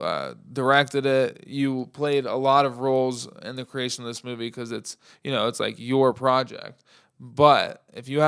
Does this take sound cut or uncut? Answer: uncut